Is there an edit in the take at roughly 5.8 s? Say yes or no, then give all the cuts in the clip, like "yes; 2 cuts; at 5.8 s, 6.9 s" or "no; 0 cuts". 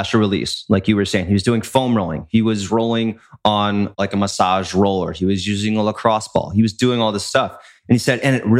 no; 1 cut; at 3.9 s